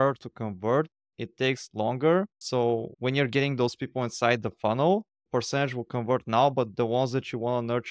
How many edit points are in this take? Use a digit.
1